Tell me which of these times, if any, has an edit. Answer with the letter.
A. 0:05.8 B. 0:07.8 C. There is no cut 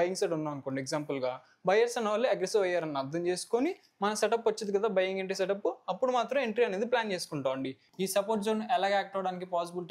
B